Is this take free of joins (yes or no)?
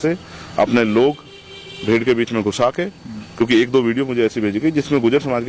yes